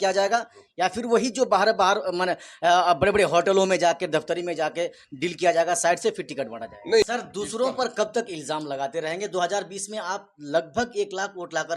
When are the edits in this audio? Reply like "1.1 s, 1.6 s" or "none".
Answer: 7.0 s